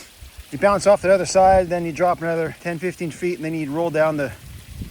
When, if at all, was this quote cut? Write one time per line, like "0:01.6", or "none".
0:02.6